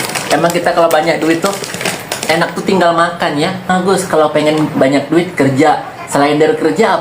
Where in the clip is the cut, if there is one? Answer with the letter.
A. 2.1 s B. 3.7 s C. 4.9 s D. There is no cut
B